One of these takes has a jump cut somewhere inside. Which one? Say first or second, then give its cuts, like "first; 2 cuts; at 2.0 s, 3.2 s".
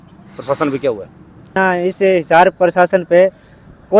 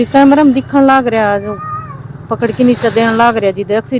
first; 1 cut; at 1.5 s